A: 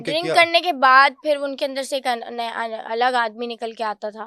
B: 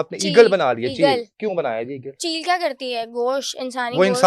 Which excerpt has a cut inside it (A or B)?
B